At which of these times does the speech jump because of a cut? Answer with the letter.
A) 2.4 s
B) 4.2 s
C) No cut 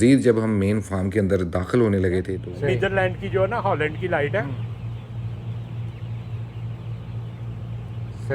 A